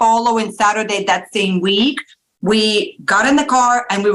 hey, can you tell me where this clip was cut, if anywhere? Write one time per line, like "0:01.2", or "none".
none